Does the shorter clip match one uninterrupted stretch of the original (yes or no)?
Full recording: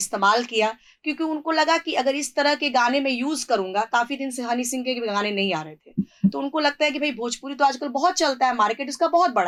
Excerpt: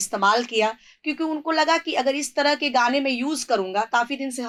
yes